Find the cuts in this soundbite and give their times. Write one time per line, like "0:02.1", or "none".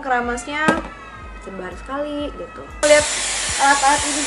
0:02.8